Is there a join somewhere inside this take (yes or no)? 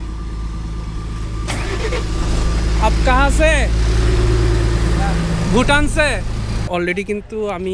yes